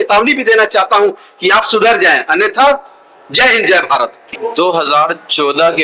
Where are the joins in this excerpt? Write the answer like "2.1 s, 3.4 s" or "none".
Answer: 4.3 s

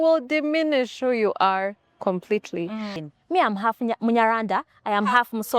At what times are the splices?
3.0 s

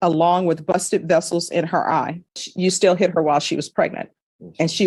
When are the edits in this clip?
2.5 s

